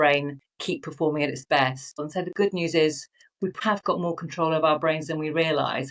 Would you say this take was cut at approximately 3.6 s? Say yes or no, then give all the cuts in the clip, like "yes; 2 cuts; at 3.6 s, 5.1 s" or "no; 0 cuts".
yes; 2 cuts; at 2.0 s, 3.6 s